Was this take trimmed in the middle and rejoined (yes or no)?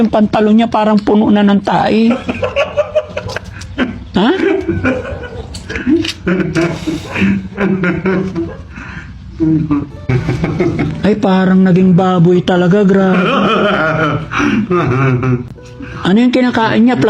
yes